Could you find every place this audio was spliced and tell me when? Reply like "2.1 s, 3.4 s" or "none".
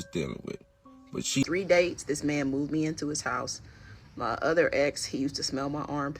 1.4 s